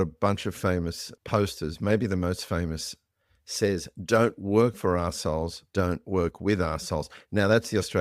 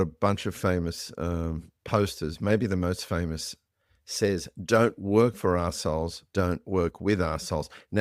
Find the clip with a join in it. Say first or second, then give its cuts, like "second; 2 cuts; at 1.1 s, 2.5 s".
first; 1 cut; at 1.1 s